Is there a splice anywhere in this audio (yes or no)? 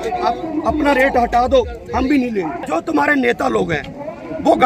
yes